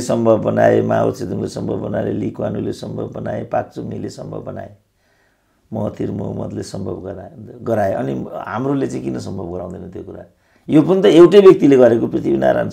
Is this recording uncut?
yes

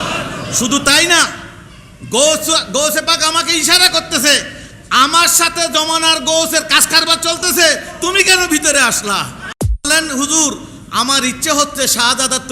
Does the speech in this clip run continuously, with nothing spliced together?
no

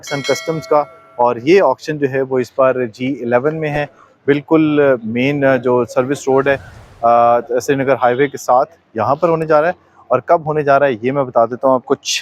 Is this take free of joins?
yes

